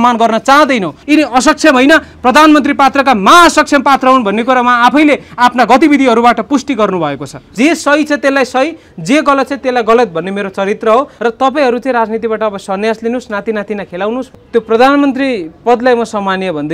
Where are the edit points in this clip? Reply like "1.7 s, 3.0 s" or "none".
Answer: 1.0 s, 7.5 s, 11.1 s, 14.3 s